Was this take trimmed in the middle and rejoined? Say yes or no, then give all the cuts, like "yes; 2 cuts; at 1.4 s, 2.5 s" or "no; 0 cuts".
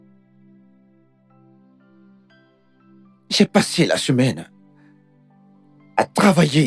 yes; 1 cut; at 1.1 s